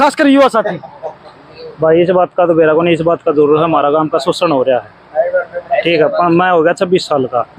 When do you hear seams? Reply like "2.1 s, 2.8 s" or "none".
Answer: none